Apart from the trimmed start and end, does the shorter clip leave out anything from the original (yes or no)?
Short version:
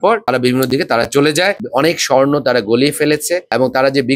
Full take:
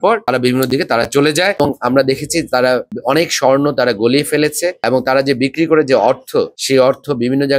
yes